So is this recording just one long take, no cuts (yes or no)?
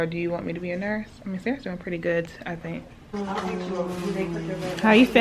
no